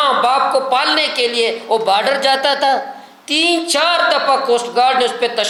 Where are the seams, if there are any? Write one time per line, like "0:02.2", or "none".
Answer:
none